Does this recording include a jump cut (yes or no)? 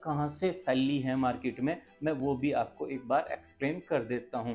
no